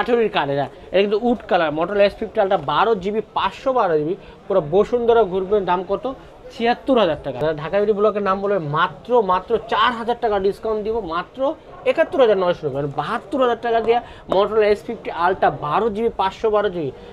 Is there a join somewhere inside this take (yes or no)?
no